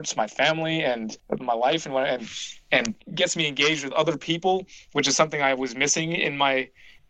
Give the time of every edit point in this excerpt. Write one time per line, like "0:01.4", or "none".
0:01.1
0:03.1